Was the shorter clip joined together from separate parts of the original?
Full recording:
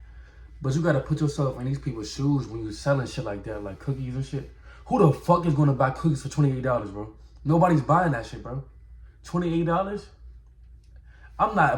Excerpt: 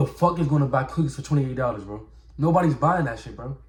no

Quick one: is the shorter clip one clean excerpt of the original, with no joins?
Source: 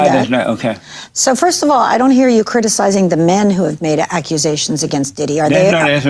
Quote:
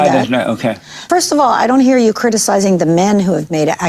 no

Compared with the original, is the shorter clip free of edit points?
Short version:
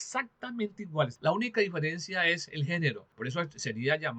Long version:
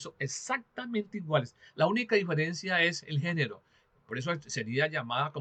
no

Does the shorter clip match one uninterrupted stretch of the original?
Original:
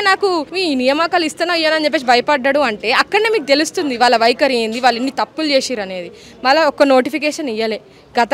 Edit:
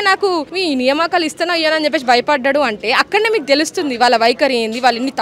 yes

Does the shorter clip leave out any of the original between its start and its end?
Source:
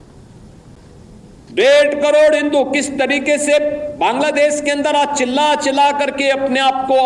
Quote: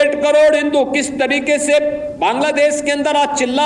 no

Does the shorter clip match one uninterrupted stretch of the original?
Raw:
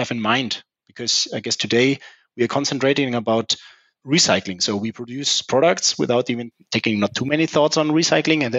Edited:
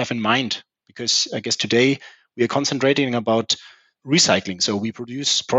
yes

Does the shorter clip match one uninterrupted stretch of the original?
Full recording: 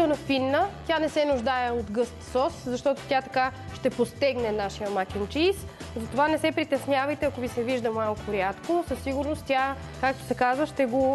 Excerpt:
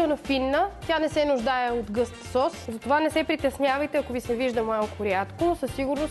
no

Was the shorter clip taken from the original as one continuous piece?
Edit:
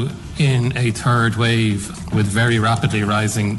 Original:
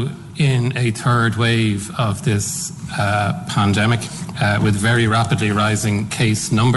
no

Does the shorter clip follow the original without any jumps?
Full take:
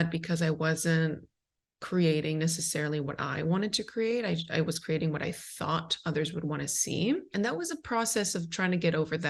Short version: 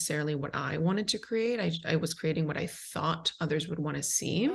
yes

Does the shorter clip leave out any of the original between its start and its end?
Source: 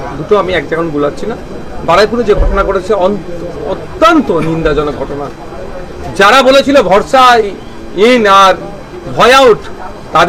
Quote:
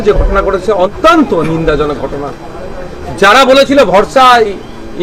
yes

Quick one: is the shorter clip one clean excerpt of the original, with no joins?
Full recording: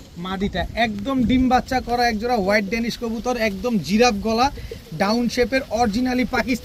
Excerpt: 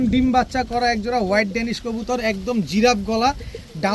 yes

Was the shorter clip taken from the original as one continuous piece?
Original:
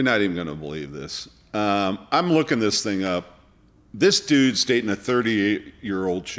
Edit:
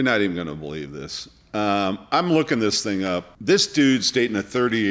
no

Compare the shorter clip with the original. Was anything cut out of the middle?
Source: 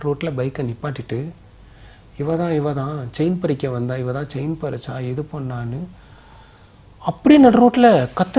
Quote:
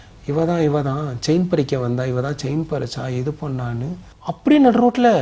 yes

